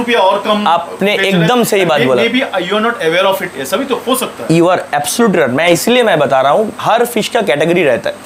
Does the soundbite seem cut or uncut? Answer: uncut